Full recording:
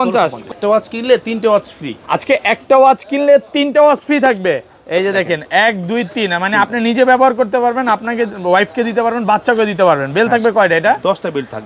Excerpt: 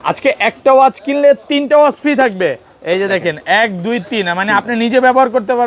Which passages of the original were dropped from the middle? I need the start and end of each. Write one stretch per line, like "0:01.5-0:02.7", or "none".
none